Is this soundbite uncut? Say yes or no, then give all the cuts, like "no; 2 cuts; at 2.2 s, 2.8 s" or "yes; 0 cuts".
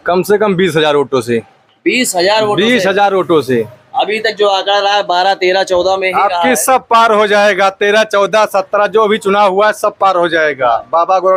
yes; 0 cuts